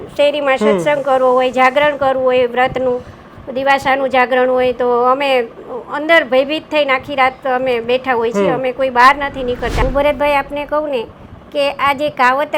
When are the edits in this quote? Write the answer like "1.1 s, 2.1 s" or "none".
9.8 s